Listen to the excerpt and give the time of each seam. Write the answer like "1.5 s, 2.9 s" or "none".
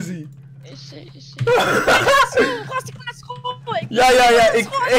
none